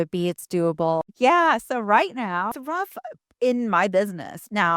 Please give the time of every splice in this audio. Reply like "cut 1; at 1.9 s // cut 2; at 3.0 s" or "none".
cut 1; at 1.0 s // cut 2; at 2.5 s